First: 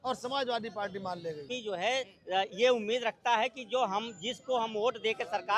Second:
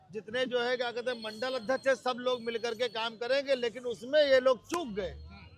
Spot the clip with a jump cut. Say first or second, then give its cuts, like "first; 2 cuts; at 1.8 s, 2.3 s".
first; 1 cut; at 1.5 s